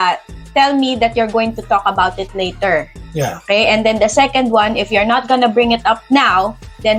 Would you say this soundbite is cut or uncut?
uncut